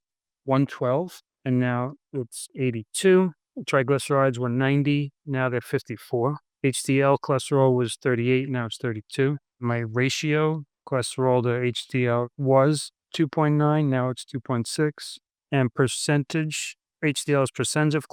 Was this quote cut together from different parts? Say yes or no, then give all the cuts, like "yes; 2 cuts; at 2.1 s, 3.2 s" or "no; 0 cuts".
no; 0 cuts